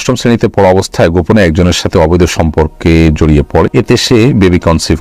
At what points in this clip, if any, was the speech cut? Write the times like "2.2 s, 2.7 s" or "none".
4.0 s